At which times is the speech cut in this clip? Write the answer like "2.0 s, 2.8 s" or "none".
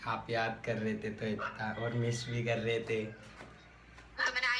none